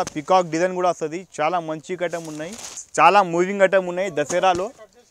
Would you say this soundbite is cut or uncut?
cut